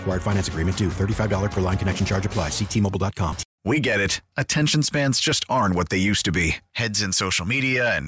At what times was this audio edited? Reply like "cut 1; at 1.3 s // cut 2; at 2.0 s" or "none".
cut 1; at 3.5 s